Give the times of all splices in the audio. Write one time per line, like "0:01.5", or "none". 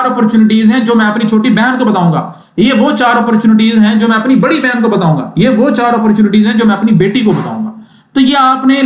none

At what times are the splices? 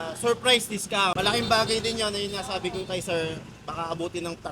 0:01.1

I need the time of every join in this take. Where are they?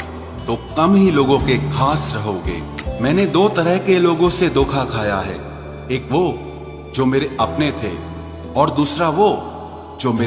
0:02.8

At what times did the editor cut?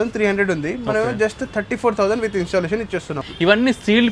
none

